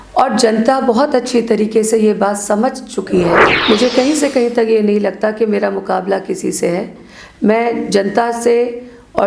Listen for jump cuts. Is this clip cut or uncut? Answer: cut